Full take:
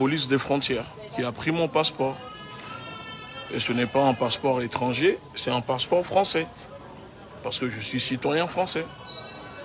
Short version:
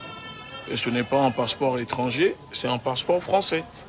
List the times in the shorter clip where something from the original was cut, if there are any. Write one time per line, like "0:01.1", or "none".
none